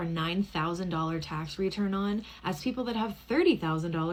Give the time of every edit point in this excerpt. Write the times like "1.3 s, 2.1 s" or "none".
none